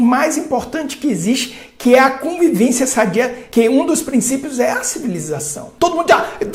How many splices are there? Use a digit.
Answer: 2